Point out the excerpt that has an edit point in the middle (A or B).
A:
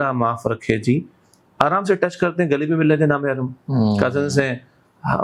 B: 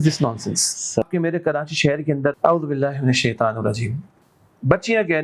B